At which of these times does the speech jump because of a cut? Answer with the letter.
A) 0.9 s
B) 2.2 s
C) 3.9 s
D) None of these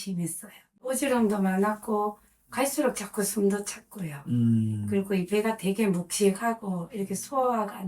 A